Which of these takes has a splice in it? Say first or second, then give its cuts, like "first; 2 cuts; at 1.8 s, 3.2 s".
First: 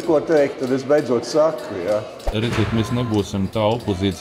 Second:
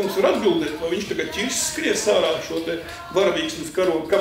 first; 1 cut; at 2.2 s